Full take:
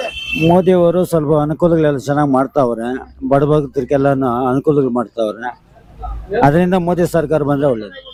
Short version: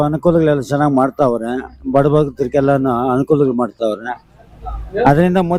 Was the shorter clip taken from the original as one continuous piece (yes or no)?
yes